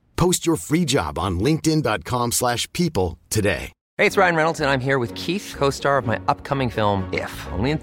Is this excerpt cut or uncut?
cut